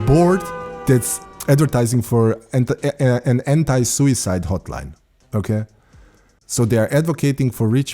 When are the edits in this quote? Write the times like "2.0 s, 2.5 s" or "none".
6.4 s

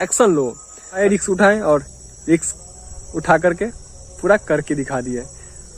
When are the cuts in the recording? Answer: 1.0 s

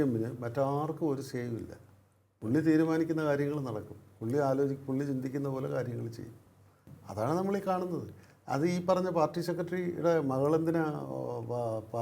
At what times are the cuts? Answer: none

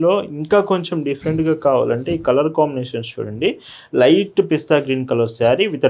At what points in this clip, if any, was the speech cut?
none

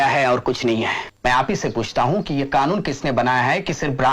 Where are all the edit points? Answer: 1.1 s

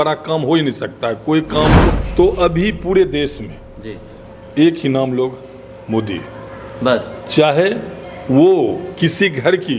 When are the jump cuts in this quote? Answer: 1.9 s

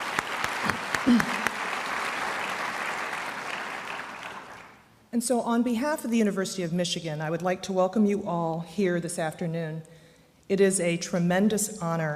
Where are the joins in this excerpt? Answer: none

